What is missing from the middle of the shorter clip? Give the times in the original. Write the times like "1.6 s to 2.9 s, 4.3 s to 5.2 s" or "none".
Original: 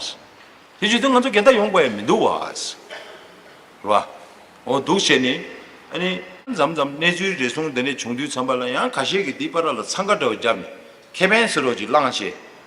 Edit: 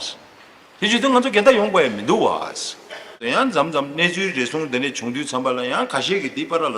3.3 s to 6.3 s